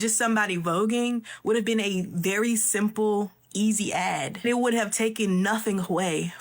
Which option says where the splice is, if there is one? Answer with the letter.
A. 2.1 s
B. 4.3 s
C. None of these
B